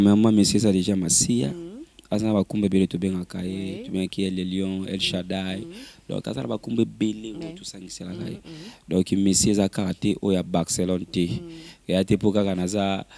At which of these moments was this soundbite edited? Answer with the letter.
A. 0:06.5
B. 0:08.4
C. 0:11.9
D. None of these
D